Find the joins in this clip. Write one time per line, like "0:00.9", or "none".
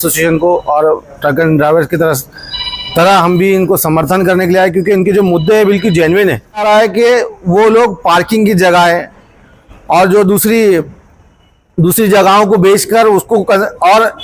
0:06.6